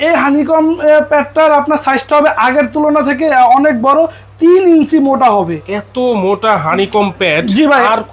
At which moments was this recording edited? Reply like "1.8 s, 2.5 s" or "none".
none